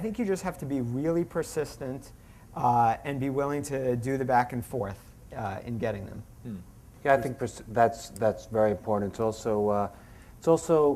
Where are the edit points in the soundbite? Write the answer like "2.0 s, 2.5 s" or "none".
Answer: 7.1 s